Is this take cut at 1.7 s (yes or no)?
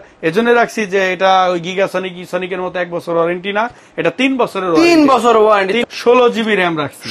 no